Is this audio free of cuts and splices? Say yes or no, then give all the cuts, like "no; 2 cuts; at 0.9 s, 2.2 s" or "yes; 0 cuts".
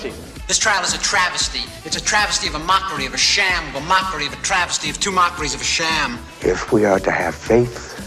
yes; 0 cuts